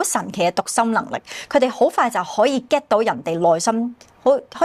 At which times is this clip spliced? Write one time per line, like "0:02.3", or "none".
none